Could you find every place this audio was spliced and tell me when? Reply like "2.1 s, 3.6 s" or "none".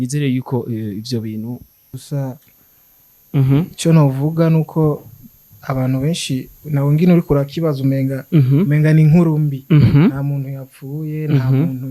2.1 s

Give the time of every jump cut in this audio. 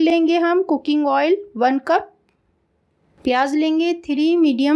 none

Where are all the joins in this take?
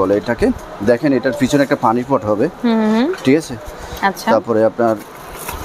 none

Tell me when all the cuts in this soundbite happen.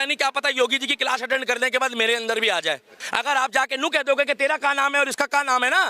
3.0 s

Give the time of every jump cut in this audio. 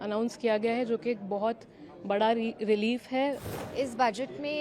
3.5 s

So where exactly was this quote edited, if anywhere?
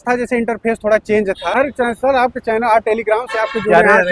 1.6 s

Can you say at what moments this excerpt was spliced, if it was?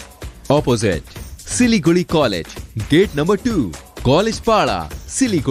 none

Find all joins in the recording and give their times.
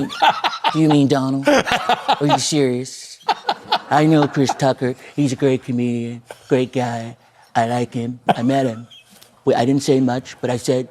3.5 s, 8.1 s

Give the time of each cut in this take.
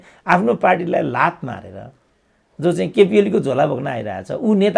none

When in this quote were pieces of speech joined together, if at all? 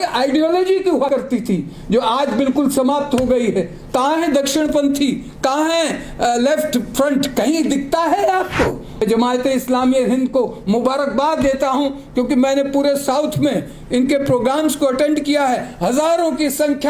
1.1 s, 8.9 s

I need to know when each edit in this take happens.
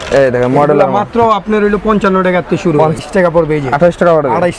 3.0 s

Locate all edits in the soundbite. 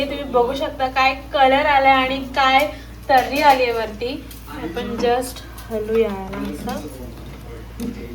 none

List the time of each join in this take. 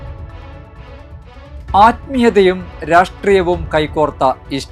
1.1 s

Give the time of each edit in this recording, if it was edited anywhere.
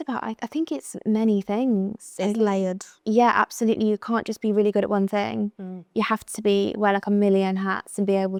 none

